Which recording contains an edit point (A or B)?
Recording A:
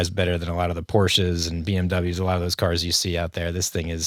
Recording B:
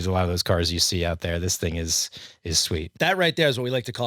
B